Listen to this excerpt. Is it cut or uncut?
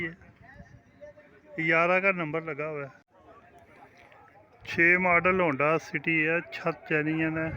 cut